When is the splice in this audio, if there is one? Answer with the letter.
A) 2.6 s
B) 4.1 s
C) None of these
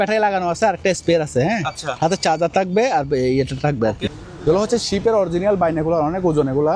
B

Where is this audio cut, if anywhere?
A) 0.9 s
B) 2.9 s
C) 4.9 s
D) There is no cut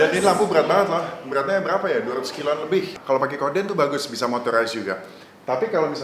B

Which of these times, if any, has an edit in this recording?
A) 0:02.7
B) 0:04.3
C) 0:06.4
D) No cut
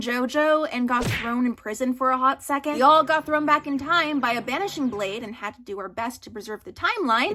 A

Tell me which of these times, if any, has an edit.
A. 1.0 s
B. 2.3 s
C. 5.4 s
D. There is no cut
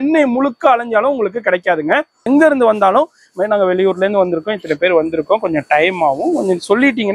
B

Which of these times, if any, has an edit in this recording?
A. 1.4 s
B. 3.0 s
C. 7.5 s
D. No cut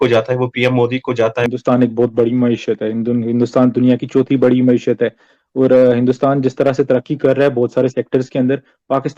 A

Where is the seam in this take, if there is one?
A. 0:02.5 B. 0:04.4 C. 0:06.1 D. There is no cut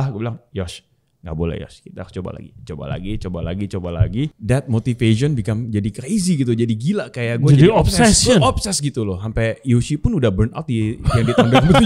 B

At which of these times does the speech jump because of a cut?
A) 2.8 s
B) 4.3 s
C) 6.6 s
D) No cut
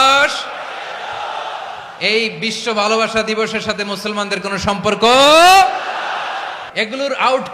C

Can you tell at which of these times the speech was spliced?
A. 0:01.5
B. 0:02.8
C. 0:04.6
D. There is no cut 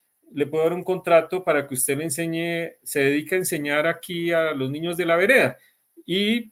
D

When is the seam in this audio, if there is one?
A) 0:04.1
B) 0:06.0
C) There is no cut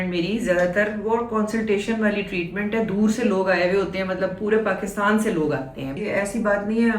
B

